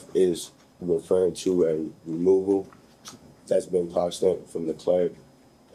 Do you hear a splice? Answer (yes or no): no